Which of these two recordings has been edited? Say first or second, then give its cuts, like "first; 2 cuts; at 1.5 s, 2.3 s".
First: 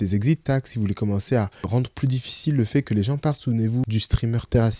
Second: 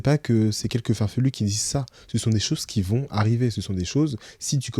first; 2 cuts; at 1.7 s, 3.9 s